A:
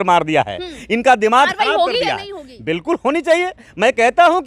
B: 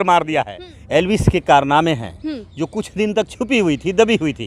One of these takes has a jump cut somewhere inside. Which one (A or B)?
B